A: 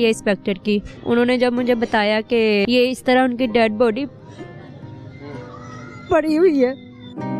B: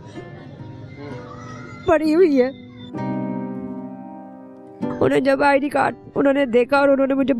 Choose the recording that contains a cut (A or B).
A